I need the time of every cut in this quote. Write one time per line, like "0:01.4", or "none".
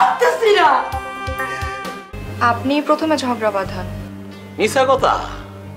0:01.9